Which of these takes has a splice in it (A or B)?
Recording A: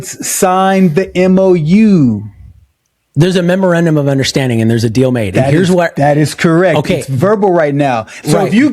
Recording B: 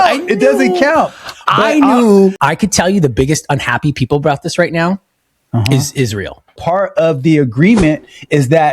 B